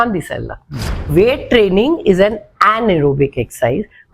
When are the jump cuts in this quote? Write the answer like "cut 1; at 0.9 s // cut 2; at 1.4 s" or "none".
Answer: cut 1; at 1.1 s